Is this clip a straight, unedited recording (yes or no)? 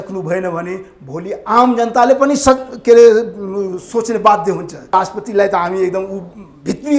no